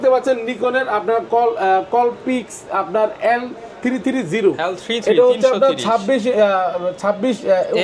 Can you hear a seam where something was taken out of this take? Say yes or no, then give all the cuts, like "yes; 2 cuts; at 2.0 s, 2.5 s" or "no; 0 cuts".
no; 0 cuts